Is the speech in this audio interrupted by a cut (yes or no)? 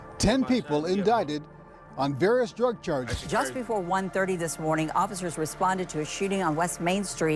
yes